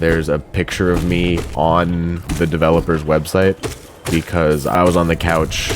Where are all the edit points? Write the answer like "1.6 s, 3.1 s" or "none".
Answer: 1.5 s, 2.2 s, 4.8 s